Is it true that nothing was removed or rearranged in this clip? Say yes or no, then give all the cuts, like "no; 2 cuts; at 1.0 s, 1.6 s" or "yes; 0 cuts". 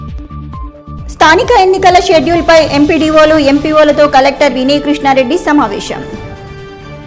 yes; 0 cuts